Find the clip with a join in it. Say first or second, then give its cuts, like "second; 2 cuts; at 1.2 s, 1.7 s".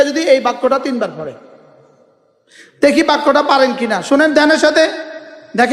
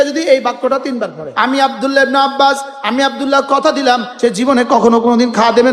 second; 2 cuts; at 1.2 s, 4.1 s